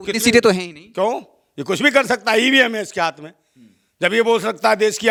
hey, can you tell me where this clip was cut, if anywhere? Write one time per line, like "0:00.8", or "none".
none